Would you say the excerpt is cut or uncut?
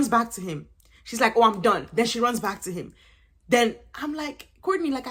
uncut